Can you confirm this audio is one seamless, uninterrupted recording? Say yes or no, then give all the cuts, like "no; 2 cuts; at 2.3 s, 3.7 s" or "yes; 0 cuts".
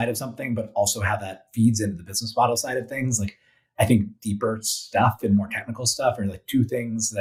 yes; 0 cuts